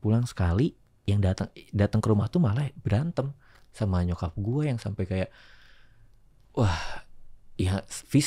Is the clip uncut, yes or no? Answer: yes